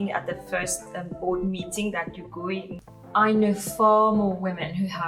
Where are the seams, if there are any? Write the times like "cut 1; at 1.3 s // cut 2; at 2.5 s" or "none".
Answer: cut 1; at 2.8 s